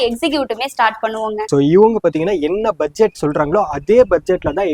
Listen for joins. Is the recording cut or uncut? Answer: cut